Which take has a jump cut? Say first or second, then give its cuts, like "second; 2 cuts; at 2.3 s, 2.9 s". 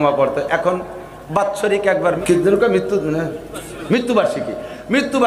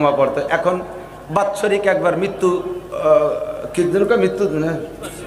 first; 1 cut; at 2.2 s